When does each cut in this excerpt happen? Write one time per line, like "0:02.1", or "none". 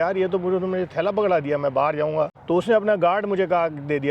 0:02.4